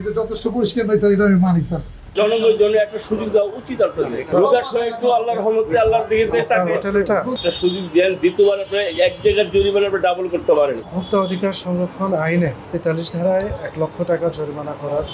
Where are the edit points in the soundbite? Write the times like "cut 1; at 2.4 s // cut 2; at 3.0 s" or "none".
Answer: cut 1; at 4.3 s // cut 2; at 7.3 s // cut 3; at 10.8 s // cut 4; at 12.7 s

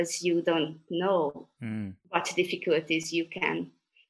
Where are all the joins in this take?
cut 1; at 2.0 s

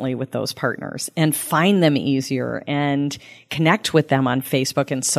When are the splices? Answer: none

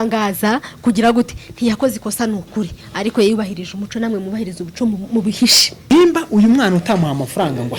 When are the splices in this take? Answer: cut 1; at 5.9 s

